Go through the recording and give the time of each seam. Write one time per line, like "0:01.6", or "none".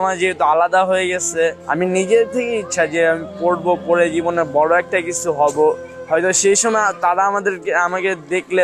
0:01.6
0:05.9